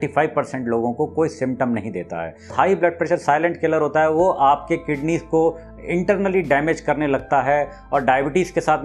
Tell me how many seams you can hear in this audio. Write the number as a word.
one